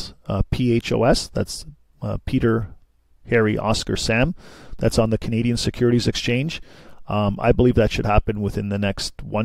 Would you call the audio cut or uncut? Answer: uncut